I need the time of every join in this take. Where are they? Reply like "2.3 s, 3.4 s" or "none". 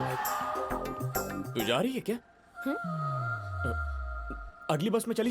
1.5 s